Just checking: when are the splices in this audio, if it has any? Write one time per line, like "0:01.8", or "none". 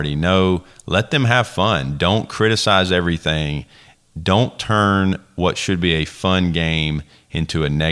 none